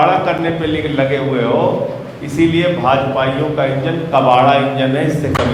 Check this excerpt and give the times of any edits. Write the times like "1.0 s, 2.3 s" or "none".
none